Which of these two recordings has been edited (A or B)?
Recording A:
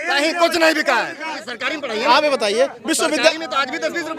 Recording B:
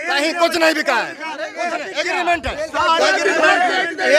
A